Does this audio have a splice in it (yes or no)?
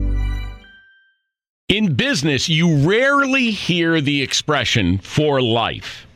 yes